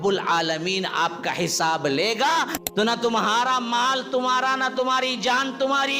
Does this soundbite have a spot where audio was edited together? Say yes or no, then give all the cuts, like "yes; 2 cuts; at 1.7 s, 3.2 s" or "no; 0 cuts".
yes; 1 cut; at 2.6 s